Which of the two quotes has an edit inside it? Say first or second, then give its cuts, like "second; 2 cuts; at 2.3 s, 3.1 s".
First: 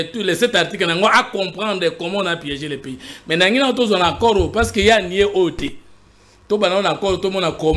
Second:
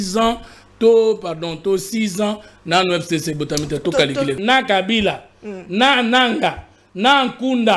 second; 1 cut; at 4.4 s